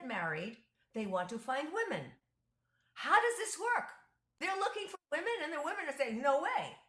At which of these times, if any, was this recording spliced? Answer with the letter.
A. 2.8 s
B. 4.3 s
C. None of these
B